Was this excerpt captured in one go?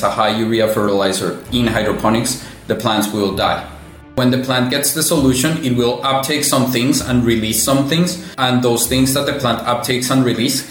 no; 2 cuts; at 4.2 s, 8.2 s

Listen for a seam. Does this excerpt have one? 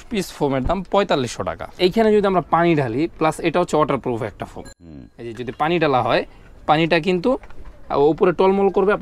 yes; 1 cut; at 1.7 s

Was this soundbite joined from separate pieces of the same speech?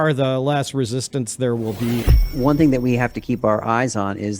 yes; 1 cut; at 2.3 s

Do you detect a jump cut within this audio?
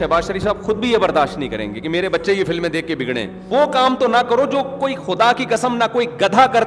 yes; 1 cut; at 3.4 s

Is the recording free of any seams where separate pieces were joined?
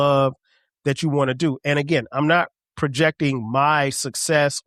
yes; 0 cuts

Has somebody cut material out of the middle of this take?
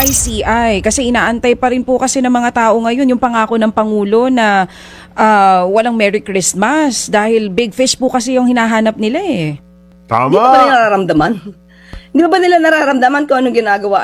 no; 0 cuts

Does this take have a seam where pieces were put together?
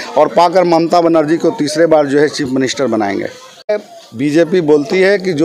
yes; 1 cut; at 3.7 s

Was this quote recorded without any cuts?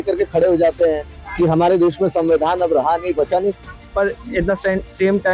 no; 1 cut; at 3.8 s

